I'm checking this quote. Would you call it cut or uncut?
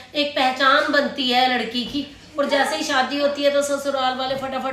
uncut